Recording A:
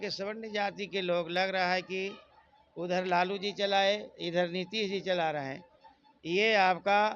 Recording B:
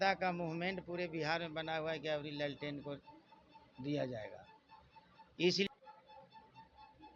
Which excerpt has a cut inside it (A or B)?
B